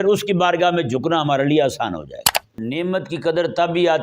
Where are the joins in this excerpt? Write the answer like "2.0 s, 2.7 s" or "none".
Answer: 2.6 s

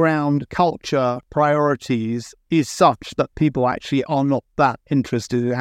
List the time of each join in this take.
1.2 s

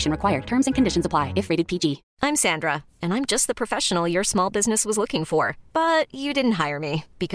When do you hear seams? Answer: 2.1 s

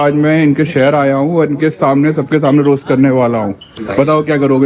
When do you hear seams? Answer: 3.7 s

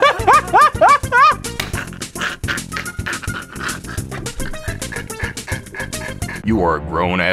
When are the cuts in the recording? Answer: 6.4 s

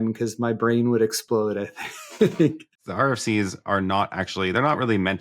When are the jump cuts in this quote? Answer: 2.7 s

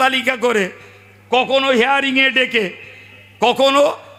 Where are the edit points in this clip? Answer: none

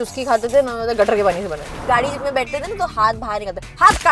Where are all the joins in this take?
1.8 s

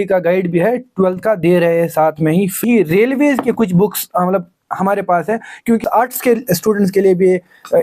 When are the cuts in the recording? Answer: 2.6 s, 5.8 s

